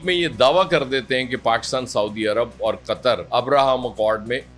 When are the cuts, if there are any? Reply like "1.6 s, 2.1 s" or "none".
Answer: none